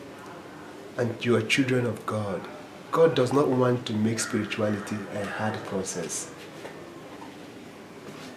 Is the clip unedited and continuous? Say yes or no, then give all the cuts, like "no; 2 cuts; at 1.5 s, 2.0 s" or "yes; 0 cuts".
yes; 0 cuts